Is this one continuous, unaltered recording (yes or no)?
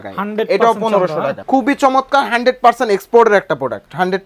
no